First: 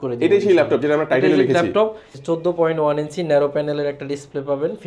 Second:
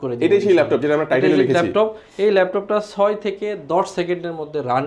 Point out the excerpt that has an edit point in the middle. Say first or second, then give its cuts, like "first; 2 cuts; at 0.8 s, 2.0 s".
first; 1 cut; at 2.0 s